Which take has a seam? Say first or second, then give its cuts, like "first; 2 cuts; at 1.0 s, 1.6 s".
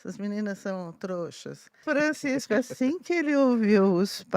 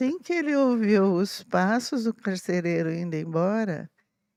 first; 1 cut; at 1.8 s